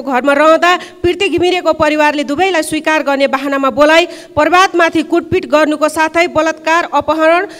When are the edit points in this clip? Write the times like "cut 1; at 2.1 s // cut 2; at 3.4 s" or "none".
none

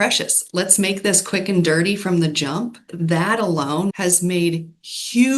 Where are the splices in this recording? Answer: cut 1; at 2.8 s // cut 2; at 3.9 s

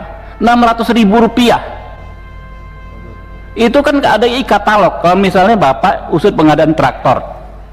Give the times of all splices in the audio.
none

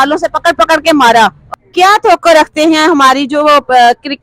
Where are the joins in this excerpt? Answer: cut 1; at 1.4 s

